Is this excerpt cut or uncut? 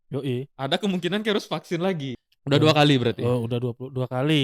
cut